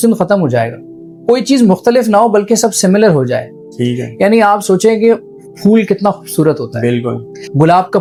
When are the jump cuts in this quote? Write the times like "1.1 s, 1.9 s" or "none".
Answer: none